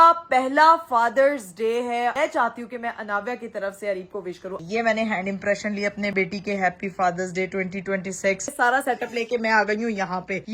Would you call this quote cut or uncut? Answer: cut